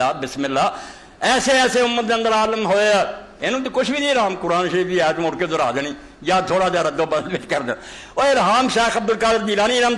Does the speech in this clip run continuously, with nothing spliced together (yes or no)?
yes